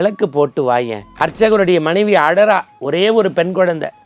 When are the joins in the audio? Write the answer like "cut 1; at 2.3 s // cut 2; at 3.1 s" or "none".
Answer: cut 1; at 1.0 s